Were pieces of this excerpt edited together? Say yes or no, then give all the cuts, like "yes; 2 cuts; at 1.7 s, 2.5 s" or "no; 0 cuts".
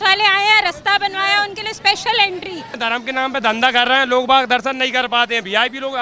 yes; 1 cut; at 2.8 s